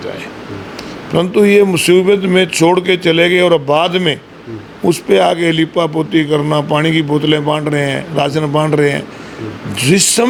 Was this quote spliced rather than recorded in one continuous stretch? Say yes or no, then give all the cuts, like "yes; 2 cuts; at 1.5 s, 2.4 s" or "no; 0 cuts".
no; 0 cuts